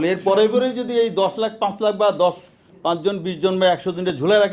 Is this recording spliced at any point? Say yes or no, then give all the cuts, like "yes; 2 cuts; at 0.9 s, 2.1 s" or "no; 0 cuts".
no; 0 cuts